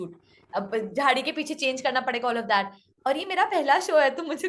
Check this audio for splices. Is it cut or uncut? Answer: uncut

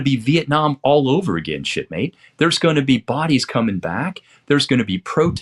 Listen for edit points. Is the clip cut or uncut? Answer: uncut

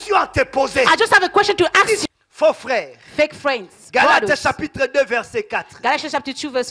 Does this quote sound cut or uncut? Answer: cut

